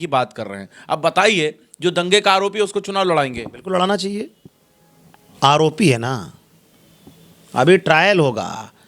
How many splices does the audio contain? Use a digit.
0